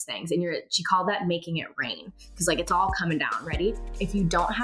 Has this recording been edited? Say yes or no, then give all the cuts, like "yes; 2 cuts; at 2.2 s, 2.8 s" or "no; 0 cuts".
no; 0 cuts